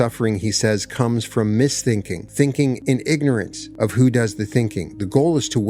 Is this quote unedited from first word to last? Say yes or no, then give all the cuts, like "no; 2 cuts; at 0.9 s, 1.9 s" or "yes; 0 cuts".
no; 3 cuts; at 2.3 s, 2.8 s, 3.6 s